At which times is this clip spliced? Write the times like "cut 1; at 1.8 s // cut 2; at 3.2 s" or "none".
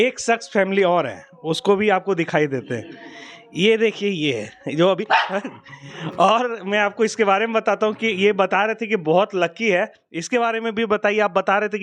none